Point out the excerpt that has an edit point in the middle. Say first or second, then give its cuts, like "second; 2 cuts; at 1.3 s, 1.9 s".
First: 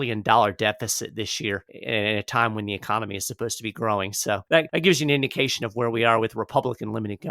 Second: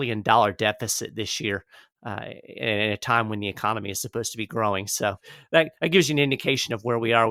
first; 2 cuts; at 1.7 s, 4.7 s